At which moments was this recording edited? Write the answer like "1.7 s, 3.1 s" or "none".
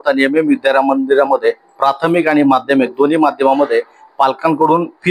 none